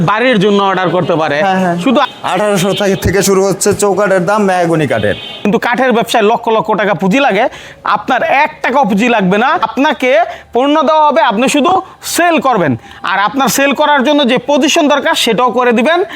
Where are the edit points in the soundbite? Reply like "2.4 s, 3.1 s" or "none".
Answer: 2.1 s, 5.4 s, 9.7 s